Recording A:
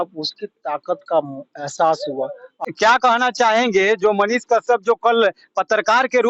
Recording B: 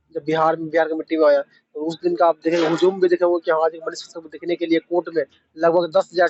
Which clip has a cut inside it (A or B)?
A